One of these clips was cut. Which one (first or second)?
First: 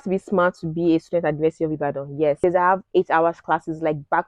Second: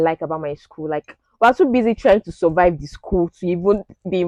first